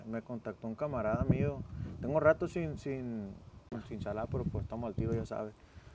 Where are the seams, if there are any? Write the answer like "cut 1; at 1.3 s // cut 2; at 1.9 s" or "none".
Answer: cut 1; at 3.8 s